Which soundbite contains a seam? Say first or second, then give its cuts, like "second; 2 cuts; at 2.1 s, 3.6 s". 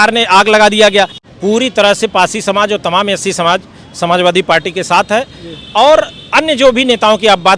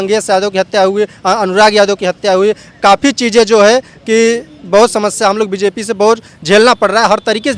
first; 1 cut; at 1.2 s